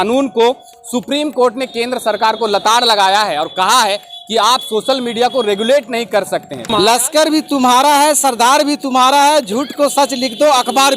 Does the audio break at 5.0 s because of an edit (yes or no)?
no